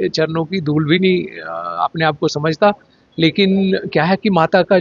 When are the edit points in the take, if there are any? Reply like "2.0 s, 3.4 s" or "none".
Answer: none